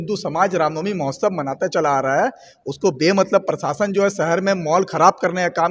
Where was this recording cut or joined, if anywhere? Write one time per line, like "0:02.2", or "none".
none